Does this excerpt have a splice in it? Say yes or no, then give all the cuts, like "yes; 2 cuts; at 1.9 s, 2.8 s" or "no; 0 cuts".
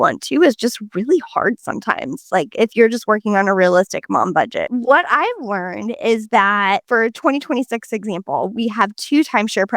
yes; 1 cut; at 4.7 s